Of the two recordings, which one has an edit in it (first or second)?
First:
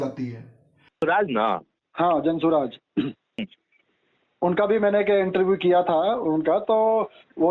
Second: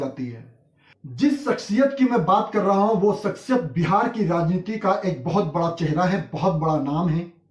first